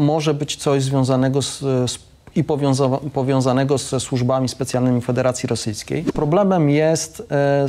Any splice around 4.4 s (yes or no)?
no